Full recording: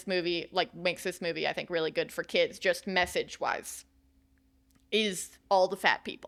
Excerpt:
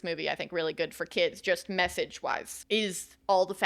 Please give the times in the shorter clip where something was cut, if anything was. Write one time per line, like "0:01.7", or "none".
0:02.5